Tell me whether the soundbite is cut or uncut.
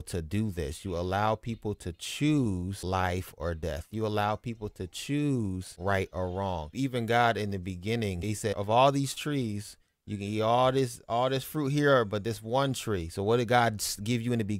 cut